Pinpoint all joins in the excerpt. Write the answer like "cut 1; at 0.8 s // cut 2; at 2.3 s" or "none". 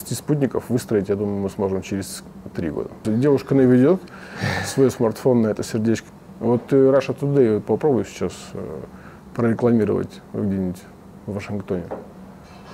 cut 1; at 6.0 s